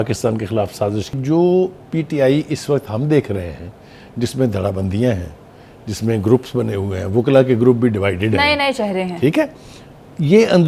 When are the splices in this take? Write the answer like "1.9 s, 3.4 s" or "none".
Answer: 1.1 s